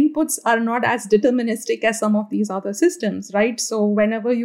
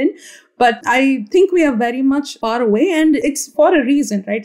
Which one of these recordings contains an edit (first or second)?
second